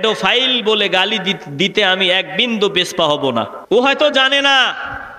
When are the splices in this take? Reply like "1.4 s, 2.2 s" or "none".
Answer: 3.6 s